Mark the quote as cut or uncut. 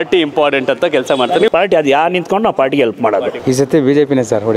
cut